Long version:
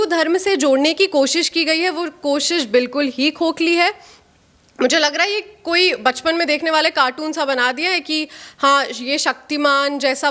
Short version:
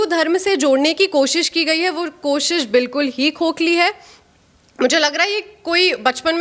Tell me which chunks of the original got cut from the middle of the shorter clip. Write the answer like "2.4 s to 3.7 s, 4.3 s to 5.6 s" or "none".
none